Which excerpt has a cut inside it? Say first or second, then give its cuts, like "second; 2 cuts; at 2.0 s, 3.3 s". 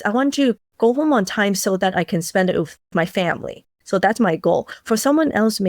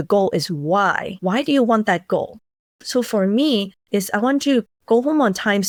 first; 1 cut; at 2.9 s